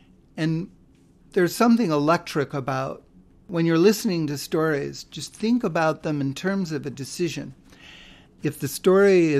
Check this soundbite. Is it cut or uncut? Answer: cut